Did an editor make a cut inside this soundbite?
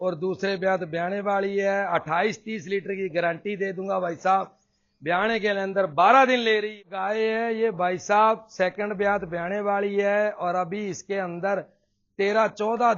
yes; 1 cut; at 6.6 s

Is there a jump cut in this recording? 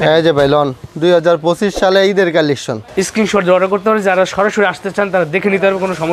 yes; 1 cut; at 2.8 s

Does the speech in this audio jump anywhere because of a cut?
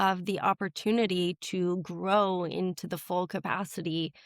no; 0 cuts

